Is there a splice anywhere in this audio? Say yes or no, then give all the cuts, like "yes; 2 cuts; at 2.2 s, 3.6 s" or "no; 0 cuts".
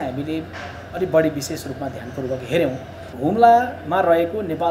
yes; 1 cut; at 3.1 s